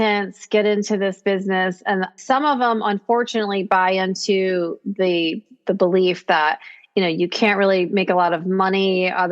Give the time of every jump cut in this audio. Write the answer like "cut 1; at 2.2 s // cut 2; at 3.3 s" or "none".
cut 1; at 2.1 s

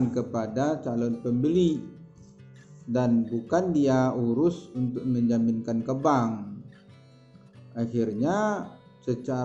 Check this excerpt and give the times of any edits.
none

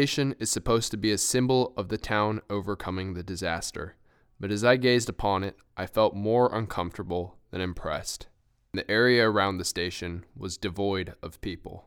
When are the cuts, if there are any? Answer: cut 1; at 8.7 s

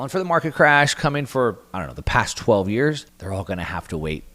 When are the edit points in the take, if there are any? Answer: cut 1; at 3.1 s

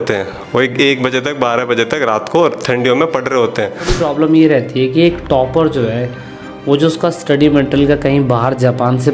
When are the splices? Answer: cut 1; at 4.0 s

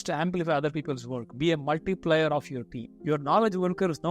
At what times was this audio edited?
cut 1; at 2.4 s

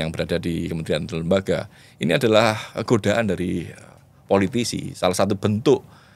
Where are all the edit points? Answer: none

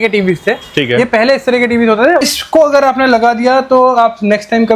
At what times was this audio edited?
cut 1; at 2.2 s

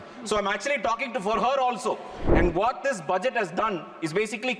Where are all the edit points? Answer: cut 1; at 2.2 s

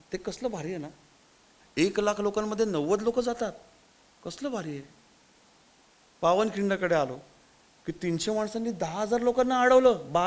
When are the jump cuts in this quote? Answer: cut 1; at 1.6 s

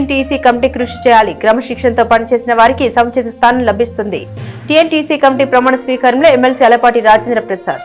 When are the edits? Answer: none

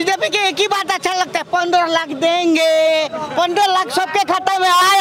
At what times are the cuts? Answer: none

